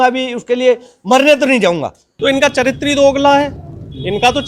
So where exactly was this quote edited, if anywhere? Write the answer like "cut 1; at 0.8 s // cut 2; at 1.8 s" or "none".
cut 1; at 2.1 s